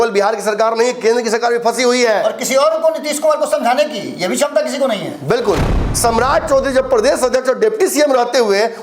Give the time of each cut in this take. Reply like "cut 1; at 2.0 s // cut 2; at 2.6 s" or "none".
cut 1; at 5.7 s